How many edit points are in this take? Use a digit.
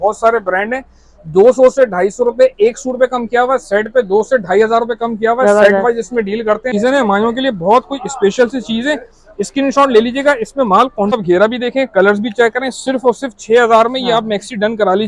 2